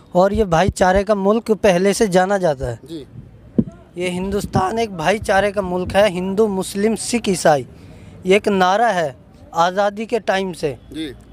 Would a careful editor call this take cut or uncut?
uncut